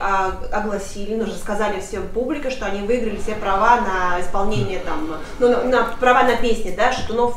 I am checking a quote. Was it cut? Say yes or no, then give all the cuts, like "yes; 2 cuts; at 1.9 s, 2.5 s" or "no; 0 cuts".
no; 0 cuts